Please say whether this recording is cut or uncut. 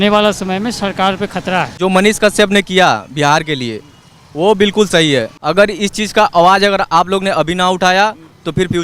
cut